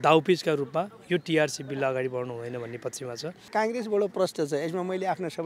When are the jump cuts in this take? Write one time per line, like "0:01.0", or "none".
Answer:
0:03.5